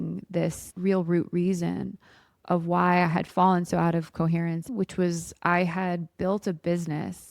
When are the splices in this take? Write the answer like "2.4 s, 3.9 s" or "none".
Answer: 4.7 s